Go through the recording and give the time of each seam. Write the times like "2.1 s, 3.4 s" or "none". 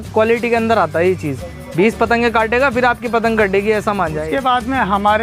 4.3 s